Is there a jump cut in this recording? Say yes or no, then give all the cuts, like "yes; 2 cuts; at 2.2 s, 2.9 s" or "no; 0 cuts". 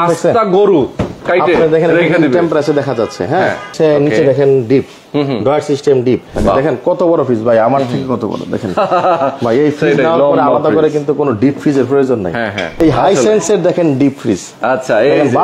yes; 3 cuts; at 3.7 s, 6.3 s, 12.7 s